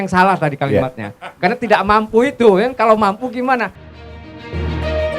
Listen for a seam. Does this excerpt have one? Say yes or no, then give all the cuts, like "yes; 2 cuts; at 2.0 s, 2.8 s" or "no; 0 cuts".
yes; 1 cut; at 3.7 s